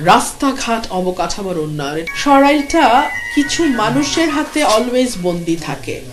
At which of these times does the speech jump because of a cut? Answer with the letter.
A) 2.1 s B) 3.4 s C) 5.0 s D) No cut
A